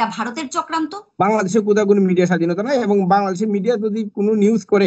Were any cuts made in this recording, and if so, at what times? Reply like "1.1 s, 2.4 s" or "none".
1.0 s